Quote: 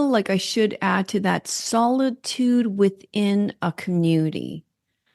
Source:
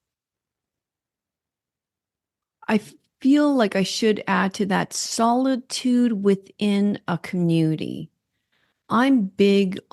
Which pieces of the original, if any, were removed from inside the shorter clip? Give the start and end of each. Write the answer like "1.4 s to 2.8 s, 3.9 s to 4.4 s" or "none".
none